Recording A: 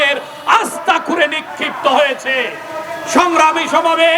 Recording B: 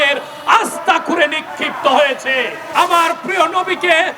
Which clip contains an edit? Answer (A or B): B